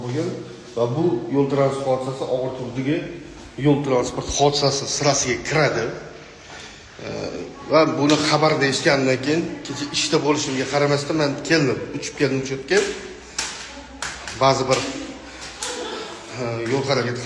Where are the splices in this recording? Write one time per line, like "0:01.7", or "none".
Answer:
0:12.9